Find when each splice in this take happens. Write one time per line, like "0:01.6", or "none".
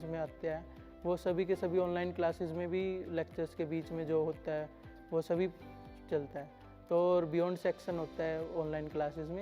none